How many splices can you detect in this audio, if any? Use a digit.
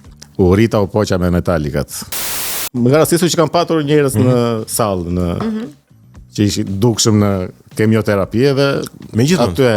1